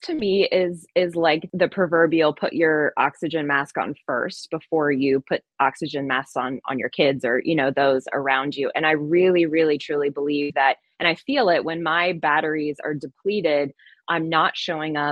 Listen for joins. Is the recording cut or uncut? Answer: cut